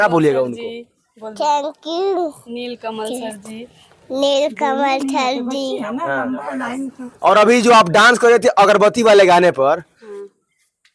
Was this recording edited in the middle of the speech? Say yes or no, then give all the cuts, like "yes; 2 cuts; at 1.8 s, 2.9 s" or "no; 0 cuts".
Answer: no; 0 cuts